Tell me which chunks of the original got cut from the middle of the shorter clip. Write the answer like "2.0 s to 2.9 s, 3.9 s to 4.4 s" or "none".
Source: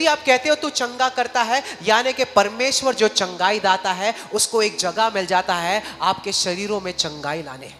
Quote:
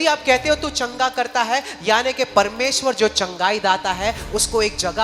none